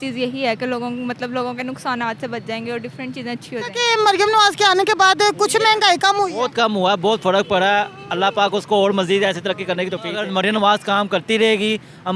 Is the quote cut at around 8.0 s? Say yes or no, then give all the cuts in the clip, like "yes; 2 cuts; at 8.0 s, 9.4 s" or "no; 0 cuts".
no; 2 cuts; at 3.8 s, 10.2 s